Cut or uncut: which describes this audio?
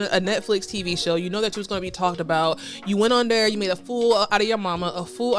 uncut